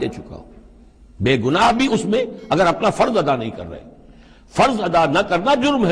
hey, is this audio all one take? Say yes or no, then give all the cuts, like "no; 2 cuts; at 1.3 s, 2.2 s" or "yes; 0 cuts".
yes; 0 cuts